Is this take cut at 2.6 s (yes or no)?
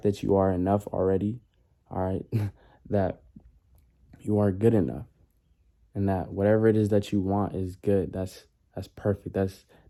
no